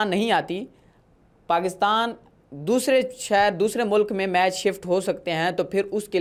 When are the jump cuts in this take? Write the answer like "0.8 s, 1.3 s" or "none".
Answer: none